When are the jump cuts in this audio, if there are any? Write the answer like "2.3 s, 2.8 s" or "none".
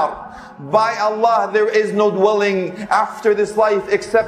none